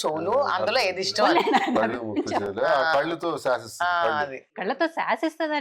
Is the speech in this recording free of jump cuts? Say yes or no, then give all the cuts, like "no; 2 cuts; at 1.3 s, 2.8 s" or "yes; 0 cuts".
no; 1 cut; at 4.5 s